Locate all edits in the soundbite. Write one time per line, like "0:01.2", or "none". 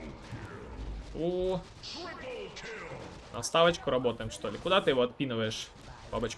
none